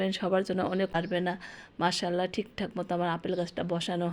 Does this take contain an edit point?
yes; 1 cut; at 0.9 s

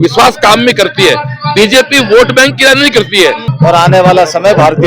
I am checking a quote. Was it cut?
yes; 1 cut; at 3.5 s

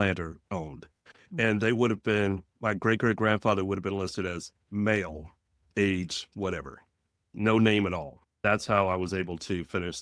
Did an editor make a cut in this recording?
yes; 1 cut; at 8.4 s

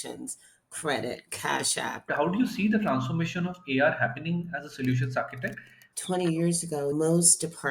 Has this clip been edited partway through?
yes; 2 cuts; at 2.1 s, 5.9 s

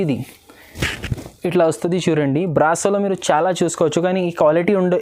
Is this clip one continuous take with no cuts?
yes; 0 cuts

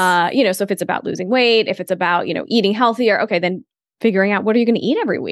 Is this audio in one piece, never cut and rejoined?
no; 1 cut; at 3.6 s

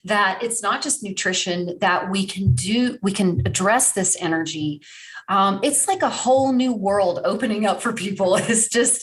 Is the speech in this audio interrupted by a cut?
no; 0 cuts

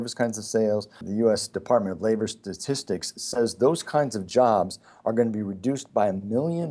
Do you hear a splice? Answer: yes; 1 cut; at 1.0 s

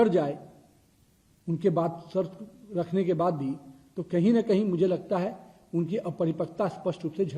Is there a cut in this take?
no; 0 cuts

